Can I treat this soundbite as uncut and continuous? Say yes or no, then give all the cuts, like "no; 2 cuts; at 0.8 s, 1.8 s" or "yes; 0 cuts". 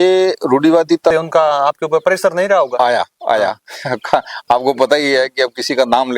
no; 1 cut; at 1.1 s